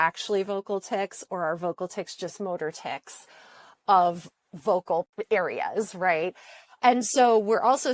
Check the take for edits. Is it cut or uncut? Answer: cut